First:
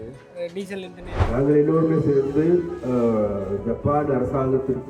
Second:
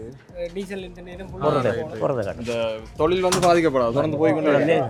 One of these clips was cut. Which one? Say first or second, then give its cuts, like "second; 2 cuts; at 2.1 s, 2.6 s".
first; 1 cut; at 1.2 s